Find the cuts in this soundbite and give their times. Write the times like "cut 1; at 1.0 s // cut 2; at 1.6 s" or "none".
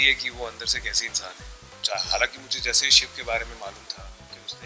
cut 1; at 1.7 s